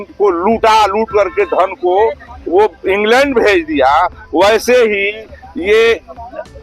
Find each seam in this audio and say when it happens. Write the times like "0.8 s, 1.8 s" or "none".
none